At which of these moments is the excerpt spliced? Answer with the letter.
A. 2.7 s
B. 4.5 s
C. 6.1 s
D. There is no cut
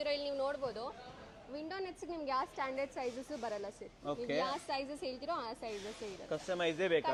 D